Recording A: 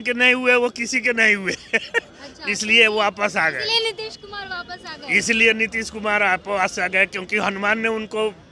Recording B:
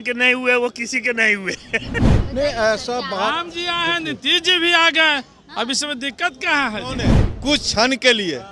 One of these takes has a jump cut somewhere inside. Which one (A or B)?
B